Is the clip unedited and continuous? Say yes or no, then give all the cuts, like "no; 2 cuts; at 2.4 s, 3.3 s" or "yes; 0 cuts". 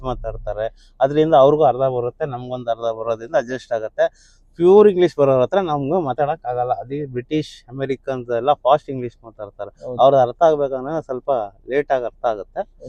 yes; 0 cuts